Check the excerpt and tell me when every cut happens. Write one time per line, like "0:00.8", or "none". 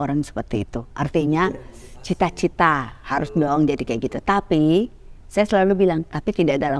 none